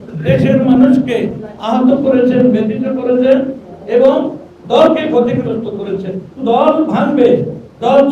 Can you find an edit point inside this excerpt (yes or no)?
yes